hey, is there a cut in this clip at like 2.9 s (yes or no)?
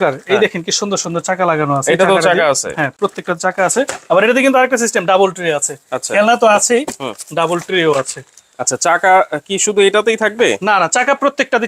no